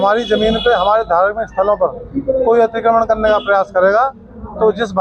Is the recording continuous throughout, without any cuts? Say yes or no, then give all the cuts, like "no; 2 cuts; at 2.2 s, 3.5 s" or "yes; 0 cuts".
yes; 0 cuts